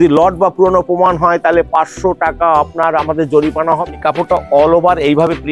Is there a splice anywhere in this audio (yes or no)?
yes